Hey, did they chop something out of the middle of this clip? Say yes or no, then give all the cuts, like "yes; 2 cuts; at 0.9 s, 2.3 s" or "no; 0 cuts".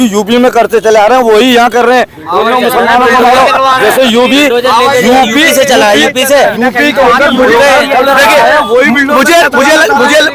no; 0 cuts